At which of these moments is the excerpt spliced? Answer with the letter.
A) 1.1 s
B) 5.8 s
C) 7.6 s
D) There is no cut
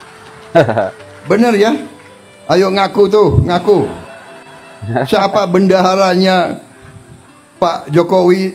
A